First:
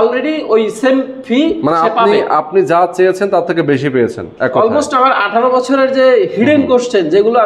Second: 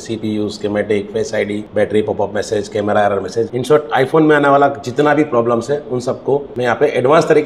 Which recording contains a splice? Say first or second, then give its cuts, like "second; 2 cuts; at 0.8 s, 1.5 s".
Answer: second; 3 cuts; at 1.6 s, 3.5 s, 6.5 s